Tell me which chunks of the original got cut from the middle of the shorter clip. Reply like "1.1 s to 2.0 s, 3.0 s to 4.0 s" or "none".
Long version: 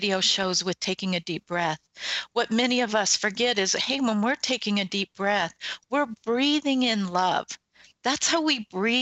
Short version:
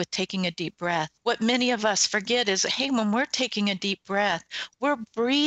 1.8 s to 2.2 s